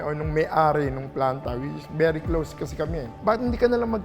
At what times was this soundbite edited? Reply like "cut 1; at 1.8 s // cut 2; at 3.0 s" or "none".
cut 1; at 3.1 s